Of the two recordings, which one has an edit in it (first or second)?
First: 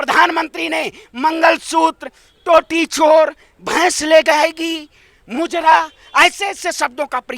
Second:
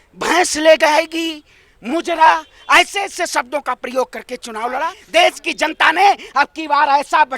second